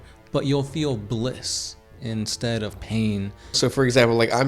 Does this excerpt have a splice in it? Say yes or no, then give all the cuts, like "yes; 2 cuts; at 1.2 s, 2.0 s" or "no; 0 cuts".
yes; 1 cut; at 3.6 s